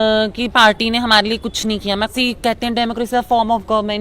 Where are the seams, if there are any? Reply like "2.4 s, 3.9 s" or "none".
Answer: 2.1 s